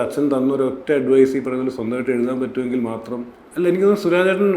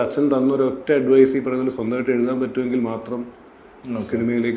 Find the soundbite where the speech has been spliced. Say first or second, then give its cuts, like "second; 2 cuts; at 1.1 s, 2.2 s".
first; 1 cut; at 3.4 s